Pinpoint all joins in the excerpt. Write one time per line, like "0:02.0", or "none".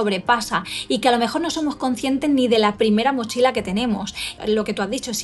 0:04.3